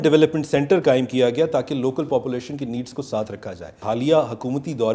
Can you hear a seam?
yes; 1 cut; at 3.8 s

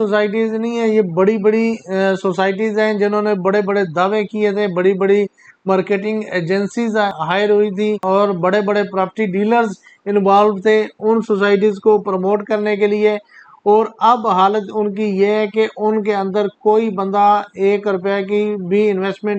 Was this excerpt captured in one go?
yes; 0 cuts

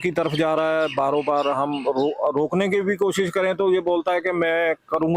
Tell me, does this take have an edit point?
no; 0 cuts

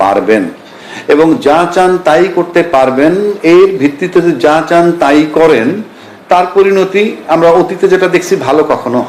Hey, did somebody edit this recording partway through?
no; 0 cuts

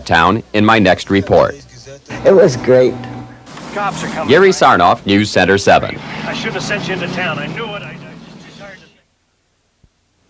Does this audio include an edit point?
yes; 1 cut; at 8.2 s

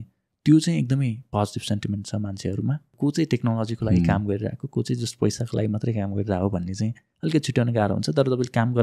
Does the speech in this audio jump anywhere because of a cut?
yes; 1 cut; at 2.9 s

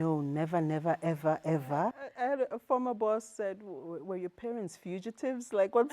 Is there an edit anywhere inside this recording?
yes; 1 cut; at 2.0 s

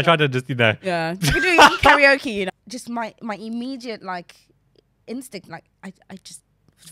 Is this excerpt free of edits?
no; 1 cut; at 2.5 s

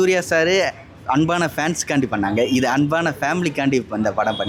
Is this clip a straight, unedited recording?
yes; 0 cuts

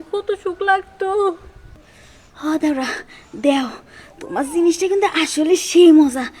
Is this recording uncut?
no; 1 cut; at 1.7 s

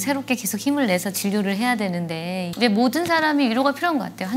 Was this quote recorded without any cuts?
no; 1 cut; at 2.5 s

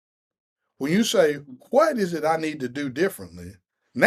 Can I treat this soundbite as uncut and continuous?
yes; 0 cuts

